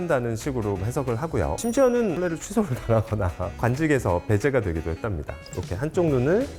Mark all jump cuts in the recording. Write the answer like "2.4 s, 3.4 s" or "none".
5.4 s